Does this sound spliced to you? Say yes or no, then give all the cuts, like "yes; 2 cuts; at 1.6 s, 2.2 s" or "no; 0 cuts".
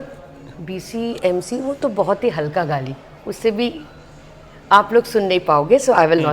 no; 0 cuts